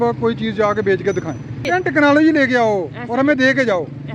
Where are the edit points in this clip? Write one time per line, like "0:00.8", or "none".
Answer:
0:01.7